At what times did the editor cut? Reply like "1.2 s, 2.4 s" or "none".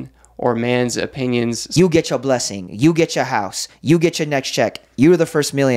1.6 s